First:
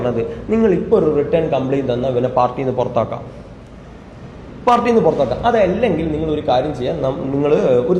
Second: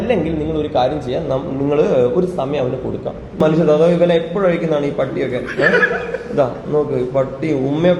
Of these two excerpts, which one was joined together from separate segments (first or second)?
second